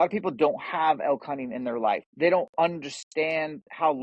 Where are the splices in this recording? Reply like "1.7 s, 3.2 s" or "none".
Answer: 2.0 s

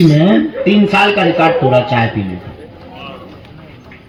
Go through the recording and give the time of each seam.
none

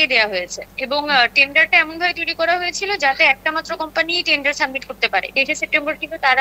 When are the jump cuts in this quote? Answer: 5.3 s

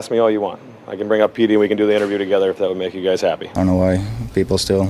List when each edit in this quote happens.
3.4 s

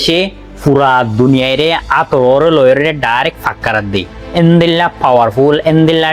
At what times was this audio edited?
none

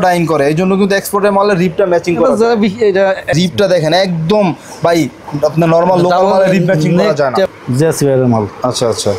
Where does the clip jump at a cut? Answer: 3.3 s, 7.6 s

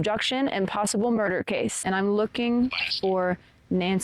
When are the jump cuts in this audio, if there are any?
1.8 s

